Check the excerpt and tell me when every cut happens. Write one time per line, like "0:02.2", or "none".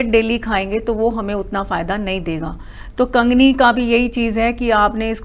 none